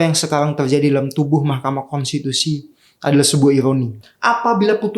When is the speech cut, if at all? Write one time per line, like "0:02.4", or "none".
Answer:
0:04.0